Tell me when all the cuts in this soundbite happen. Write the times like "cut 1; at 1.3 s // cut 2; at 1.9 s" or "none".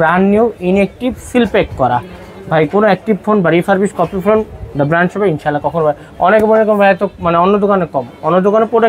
none